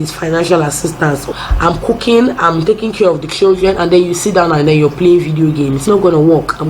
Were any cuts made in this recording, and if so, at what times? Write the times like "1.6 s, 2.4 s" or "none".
1.3 s, 5.8 s